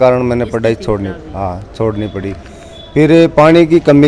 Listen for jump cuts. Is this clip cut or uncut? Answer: uncut